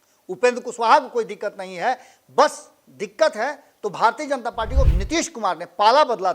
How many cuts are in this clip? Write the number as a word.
one